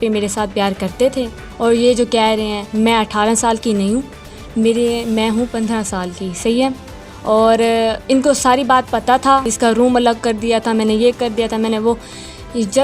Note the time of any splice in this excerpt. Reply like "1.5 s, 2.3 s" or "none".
1.4 s, 9.5 s